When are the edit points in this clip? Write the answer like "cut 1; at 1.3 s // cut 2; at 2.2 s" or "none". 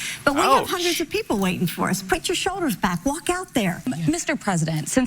cut 1; at 3.9 s